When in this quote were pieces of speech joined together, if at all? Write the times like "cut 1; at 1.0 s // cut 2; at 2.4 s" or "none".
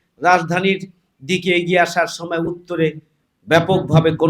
none

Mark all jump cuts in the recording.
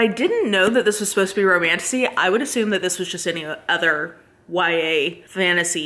none

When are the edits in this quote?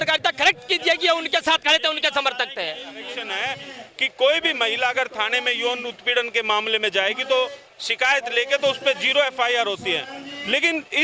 cut 1; at 3.3 s

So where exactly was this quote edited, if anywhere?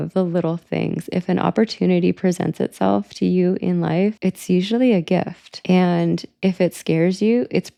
none

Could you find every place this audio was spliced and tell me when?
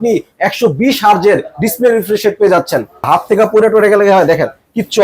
cut 1; at 3.1 s

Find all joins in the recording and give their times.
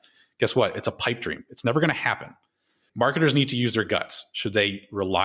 cut 1; at 2.8 s

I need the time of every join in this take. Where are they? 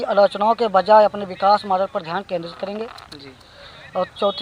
none

